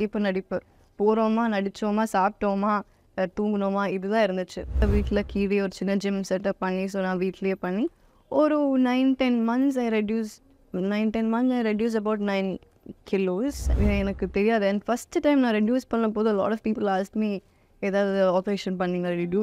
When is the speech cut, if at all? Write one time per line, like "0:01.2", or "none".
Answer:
0:04.8
0:13.7